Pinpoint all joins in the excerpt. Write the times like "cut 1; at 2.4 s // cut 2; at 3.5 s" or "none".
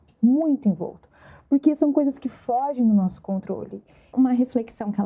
cut 1; at 4.1 s